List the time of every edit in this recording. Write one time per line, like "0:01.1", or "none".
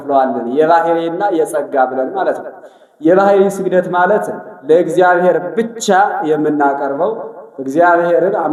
none